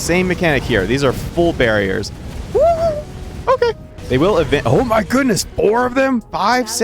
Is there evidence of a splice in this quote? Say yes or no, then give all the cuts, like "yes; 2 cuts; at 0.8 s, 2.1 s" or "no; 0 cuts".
yes; 2 cuts; at 1.2 s, 3.4 s